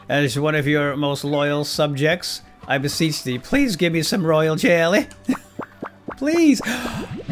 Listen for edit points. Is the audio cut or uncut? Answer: uncut